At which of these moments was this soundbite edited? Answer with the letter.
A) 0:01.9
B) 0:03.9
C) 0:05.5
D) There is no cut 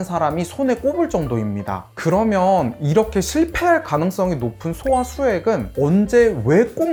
D